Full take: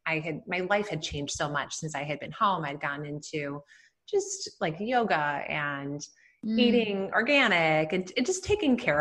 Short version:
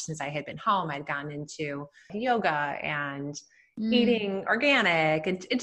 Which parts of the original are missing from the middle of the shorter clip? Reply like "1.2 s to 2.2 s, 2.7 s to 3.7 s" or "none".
3.8 s to 4.8 s